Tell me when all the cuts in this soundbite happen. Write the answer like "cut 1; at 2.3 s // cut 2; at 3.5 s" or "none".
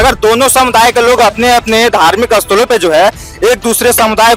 none